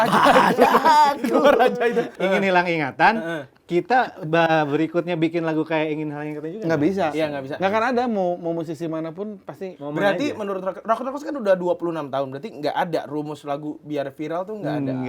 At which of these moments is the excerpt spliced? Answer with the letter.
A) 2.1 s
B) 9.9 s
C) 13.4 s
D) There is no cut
A